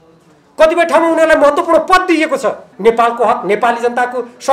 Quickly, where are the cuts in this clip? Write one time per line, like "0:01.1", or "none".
0:02.7